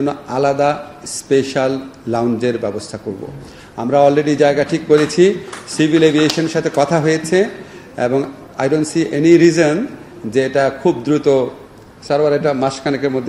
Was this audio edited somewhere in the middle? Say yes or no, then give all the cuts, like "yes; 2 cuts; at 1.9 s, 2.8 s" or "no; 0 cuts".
no; 0 cuts